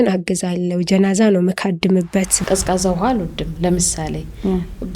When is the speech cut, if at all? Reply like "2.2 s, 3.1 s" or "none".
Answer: 2.4 s